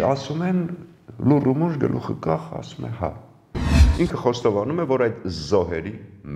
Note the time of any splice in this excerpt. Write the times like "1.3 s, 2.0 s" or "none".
3.8 s